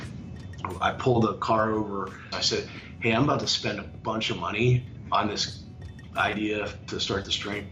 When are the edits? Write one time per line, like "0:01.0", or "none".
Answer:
0:02.4
0:04.9